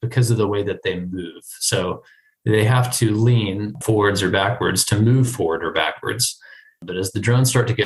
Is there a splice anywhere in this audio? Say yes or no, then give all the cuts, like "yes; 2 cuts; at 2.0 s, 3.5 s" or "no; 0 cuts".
yes; 2 cuts; at 3.7 s, 6.8 s